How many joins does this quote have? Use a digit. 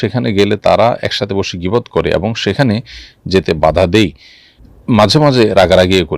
0